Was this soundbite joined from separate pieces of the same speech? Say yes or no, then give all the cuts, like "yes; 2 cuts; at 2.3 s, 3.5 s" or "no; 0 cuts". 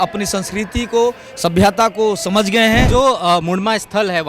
yes; 1 cut; at 2.9 s